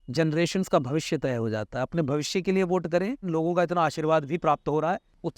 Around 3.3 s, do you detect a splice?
yes; 1 cut; at 3.3 s

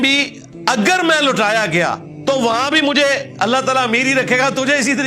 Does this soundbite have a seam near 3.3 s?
no; 1 cut; at 2.1 s

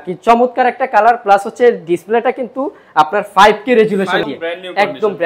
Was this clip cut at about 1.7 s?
no; 1 cut; at 4.2 s

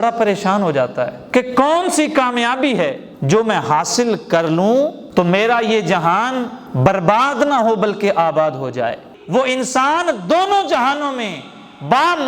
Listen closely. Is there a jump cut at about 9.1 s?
yes; 1 cut; at 9.1 s

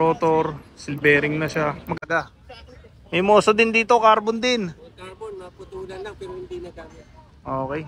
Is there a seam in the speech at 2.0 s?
yes; 1 cut; at 2.0 s

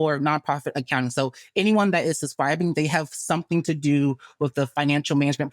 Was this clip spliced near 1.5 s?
no; 0 cuts

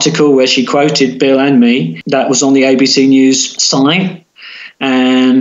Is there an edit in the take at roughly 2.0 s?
yes; 2 cuts; at 2.0 s, 3.5 s

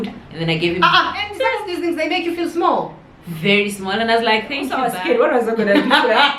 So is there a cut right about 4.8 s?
yes; 2 cuts; at 1.3 s, 4.8 s

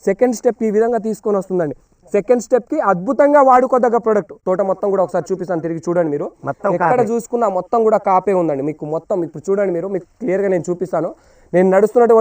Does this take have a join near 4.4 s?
yes; 1 cut; at 4.4 s

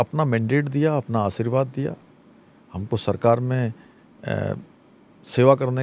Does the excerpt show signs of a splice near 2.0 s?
no; 0 cuts

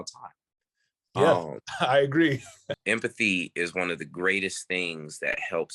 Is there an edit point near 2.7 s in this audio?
yes; 1 cut; at 2.7 s

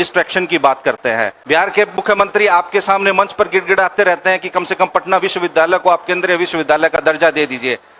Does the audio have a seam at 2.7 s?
no; 1 cut; at 1.4 s

